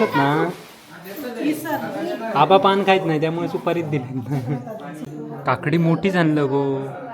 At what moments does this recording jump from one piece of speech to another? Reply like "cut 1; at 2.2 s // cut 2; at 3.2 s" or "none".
cut 1; at 5.0 s

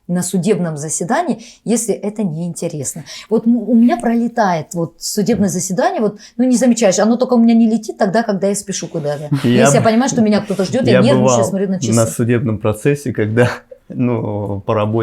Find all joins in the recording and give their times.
none

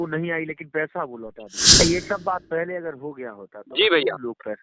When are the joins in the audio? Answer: cut 1; at 1.8 s

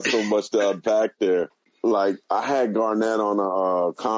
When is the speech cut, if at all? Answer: cut 1; at 1.6 s

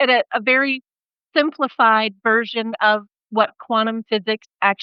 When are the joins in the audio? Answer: none

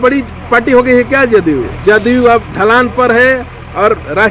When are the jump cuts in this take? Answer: cut 1; at 1.7 s

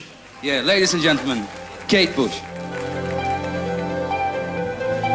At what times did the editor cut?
cut 1; at 2.6 s

